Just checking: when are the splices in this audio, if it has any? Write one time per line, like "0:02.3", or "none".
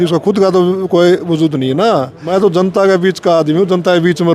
0:02.2